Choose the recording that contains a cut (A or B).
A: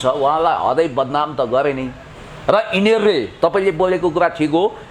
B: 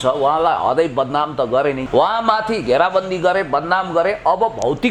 B